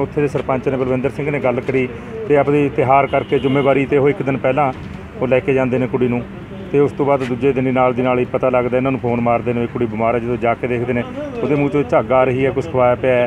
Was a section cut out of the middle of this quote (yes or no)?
no